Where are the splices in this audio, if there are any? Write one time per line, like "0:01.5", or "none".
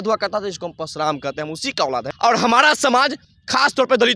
0:02.1